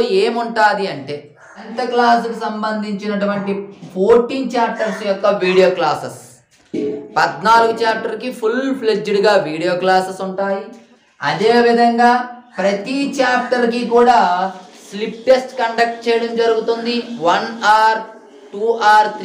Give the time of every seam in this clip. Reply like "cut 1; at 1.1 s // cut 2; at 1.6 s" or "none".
cut 1; at 1.7 s